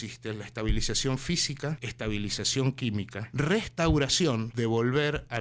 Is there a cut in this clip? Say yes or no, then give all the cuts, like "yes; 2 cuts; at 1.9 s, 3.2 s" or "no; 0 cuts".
yes; 3 cuts; at 1.9 s, 3.2 s, 4.5 s